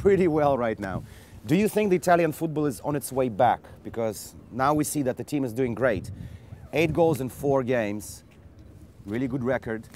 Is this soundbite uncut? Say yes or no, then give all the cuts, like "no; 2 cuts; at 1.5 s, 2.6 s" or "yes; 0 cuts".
yes; 0 cuts